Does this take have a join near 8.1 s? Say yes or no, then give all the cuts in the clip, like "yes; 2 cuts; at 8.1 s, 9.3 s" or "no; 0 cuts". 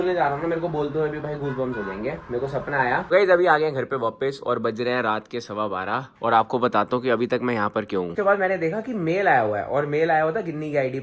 yes; 2 cuts; at 3.0 s, 8.1 s